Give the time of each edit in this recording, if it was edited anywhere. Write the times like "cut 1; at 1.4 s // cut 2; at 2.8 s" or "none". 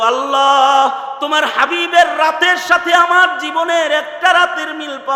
none